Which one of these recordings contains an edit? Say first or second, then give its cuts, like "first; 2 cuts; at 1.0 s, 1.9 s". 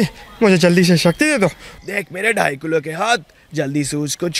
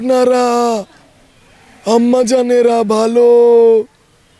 first; 1 cut; at 1.7 s